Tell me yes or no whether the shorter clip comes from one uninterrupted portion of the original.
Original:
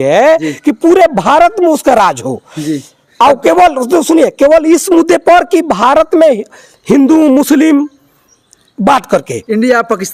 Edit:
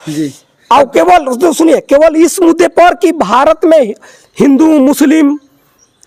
yes